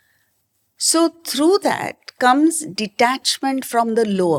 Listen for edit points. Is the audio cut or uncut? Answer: uncut